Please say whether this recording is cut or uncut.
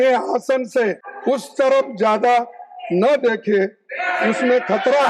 cut